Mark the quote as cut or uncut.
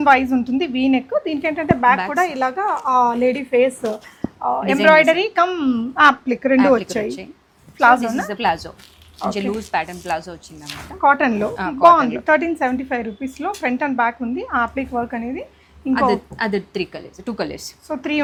uncut